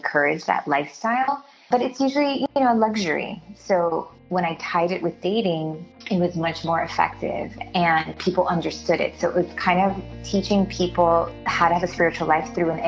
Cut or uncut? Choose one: uncut